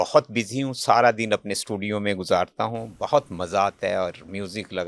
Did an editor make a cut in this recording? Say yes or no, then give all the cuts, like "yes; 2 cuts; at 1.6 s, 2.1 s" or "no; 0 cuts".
no; 0 cuts